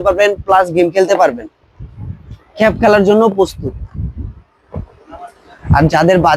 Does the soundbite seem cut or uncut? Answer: uncut